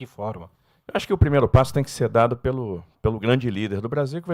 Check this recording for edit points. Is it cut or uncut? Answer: uncut